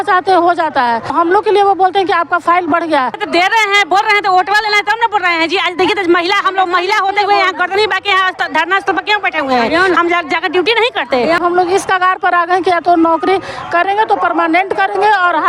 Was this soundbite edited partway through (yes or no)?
yes